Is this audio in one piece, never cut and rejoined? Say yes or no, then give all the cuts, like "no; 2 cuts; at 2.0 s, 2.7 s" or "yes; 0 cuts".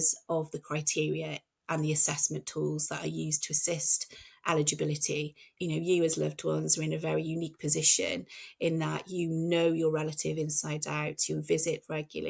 no; 1 cut; at 5.4 s